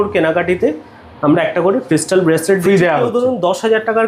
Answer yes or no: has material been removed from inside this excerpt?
no